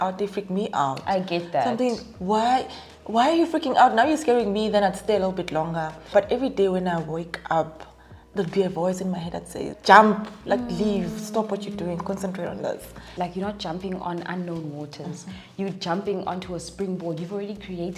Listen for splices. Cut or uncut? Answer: cut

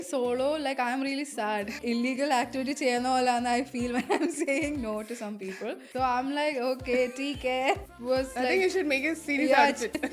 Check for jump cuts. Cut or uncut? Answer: cut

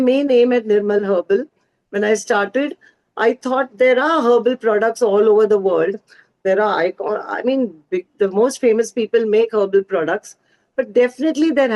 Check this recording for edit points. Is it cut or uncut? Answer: uncut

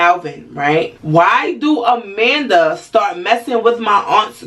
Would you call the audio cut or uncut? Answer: cut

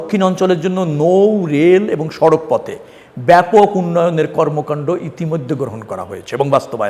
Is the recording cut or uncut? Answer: uncut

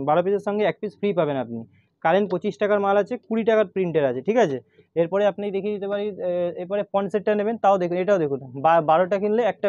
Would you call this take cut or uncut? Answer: uncut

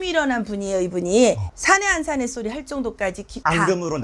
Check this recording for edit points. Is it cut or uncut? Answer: cut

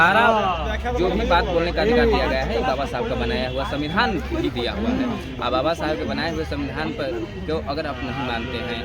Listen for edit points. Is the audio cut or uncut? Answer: uncut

